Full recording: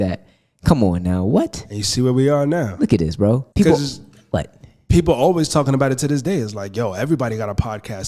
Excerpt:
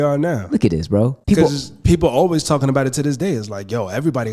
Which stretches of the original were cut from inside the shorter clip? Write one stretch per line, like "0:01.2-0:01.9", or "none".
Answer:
0:04.0-0:04.7